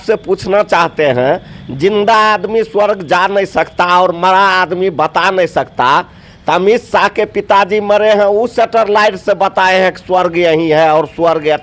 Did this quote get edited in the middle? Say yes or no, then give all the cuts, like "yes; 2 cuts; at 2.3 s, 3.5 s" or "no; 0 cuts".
no; 0 cuts